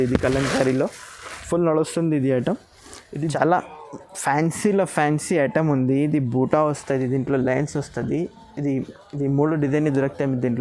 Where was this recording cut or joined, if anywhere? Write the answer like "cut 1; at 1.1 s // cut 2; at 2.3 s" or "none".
cut 1; at 3.0 s